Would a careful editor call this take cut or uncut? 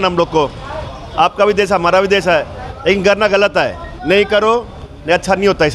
uncut